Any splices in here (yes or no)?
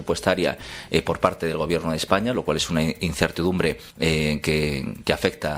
yes